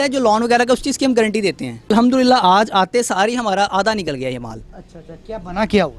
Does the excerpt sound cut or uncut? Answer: cut